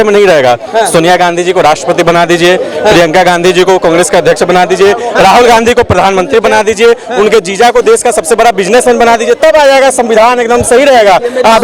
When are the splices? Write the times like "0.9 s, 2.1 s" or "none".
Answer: none